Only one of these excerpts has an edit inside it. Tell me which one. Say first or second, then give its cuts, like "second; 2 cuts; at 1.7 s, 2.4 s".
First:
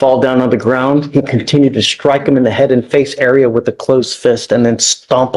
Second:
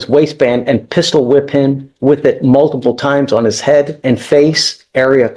second; 1 cut; at 3.9 s